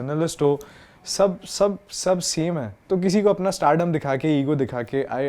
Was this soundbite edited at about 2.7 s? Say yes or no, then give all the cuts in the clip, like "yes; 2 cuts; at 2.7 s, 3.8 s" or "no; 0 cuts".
yes; 1 cut; at 2.7 s